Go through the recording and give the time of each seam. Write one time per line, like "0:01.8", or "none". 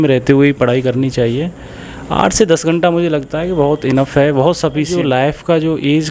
0:04.9